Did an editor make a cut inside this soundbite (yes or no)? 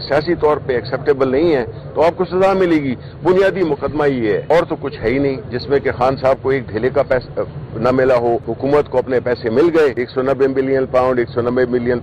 yes